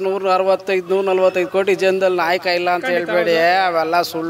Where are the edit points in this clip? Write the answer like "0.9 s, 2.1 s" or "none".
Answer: none